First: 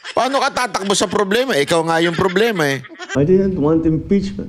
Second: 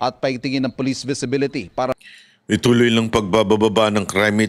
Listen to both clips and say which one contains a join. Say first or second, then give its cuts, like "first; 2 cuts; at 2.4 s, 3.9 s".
first; 1 cut; at 2.9 s